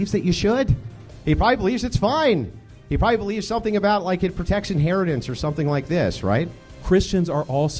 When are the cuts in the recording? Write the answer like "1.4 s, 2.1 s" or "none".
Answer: 6.7 s